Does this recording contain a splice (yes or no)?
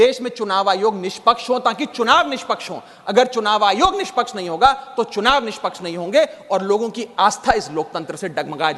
no